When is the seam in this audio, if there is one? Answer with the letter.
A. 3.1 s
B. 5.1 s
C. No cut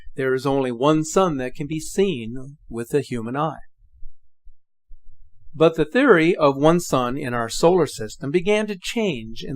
A